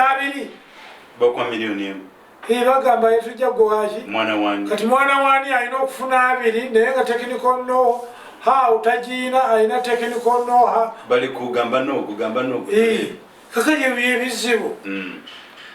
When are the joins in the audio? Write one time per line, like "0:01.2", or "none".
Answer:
none